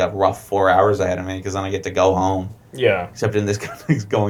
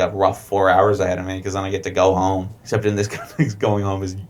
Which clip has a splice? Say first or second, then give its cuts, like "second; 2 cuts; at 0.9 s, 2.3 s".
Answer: second; 1 cut; at 2.6 s